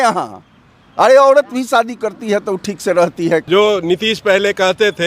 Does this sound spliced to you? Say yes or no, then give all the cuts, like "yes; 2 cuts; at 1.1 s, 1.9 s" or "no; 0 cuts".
yes; 1 cut; at 3.4 s